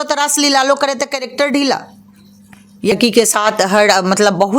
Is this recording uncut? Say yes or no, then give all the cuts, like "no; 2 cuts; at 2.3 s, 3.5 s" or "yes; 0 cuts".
no; 1 cut; at 2.9 s